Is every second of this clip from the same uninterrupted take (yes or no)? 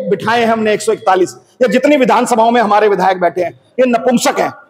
yes